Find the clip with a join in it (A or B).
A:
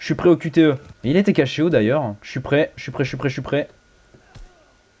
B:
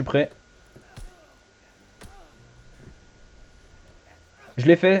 A